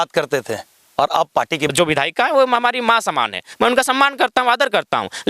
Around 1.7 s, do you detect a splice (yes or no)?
yes